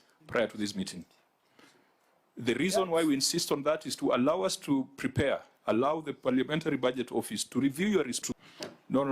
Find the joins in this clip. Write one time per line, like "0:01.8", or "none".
0:08.2